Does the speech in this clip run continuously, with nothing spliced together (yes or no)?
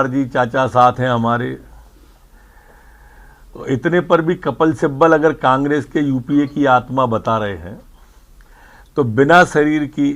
yes